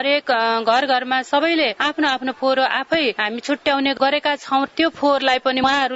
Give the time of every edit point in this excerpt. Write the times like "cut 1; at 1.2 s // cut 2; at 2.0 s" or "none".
cut 1; at 4.7 s